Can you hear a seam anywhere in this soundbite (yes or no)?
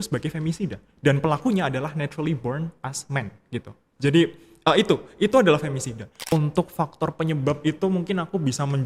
yes